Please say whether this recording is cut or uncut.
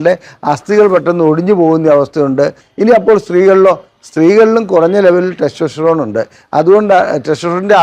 cut